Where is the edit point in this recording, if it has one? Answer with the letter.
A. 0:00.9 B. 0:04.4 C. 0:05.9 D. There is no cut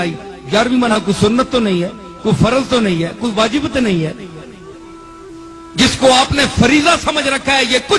A